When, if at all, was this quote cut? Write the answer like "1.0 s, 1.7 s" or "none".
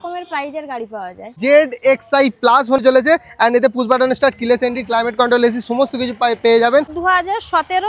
1.4 s, 2.8 s, 7.0 s